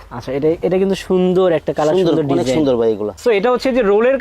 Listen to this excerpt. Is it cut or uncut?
cut